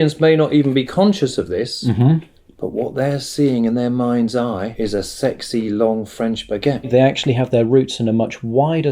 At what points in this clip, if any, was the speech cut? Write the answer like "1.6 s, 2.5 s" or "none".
4.7 s, 6.9 s